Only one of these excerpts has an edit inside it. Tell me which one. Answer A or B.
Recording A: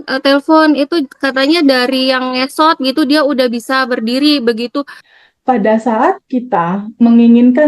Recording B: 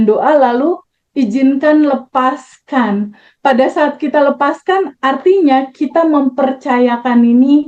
A